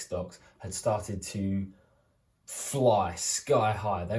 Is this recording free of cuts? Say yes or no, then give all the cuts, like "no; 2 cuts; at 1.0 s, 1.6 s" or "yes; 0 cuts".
yes; 0 cuts